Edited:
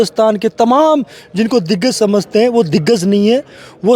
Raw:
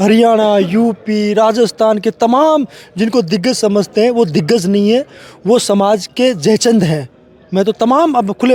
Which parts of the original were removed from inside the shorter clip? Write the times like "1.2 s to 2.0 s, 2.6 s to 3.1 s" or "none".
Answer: none